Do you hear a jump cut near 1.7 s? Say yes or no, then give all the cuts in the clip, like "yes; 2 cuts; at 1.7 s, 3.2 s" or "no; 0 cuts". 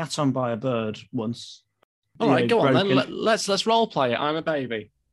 yes; 1 cut; at 1.7 s